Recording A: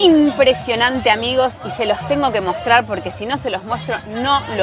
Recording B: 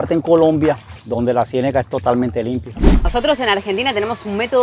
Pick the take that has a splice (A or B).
B